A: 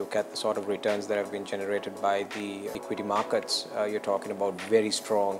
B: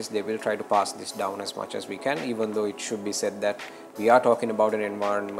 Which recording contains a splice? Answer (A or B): A